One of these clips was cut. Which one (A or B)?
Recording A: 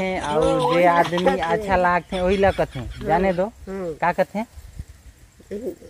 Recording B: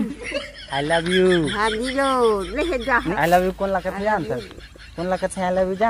B